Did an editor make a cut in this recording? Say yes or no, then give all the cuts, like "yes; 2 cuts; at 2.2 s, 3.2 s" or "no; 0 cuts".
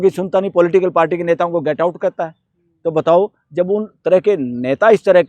no; 0 cuts